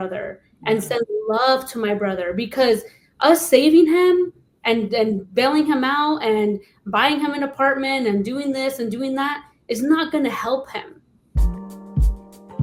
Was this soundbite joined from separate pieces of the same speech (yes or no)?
yes